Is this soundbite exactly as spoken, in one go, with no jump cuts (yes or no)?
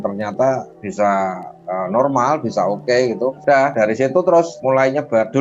no